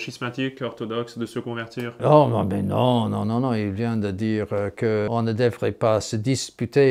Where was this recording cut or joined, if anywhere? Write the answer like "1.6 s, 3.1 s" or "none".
2.0 s, 5.1 s